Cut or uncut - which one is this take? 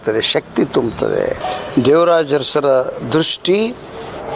cut